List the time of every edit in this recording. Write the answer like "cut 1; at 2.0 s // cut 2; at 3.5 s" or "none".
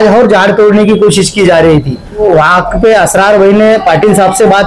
cut 1; at 2.2 s